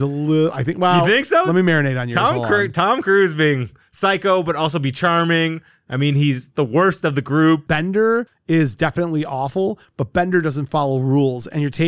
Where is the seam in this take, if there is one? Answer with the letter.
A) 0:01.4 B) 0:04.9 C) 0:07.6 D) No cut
C